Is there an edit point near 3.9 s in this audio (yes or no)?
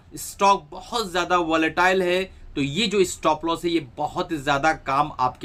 no